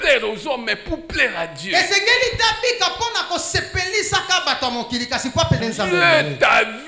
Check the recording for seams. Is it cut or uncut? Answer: uncut